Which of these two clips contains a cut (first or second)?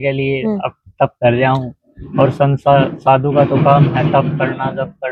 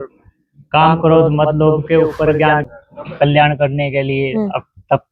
second